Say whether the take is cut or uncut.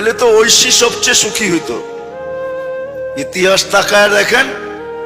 uncut